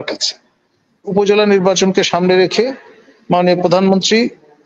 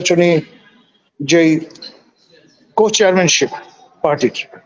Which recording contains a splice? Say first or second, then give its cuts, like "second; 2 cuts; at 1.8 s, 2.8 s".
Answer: first; 1 cut; at 1.1 s